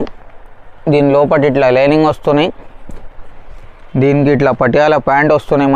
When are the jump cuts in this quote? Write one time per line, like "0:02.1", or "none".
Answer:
none